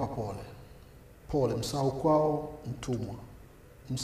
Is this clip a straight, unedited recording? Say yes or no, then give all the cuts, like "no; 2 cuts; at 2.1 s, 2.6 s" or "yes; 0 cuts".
yes; 0 cuts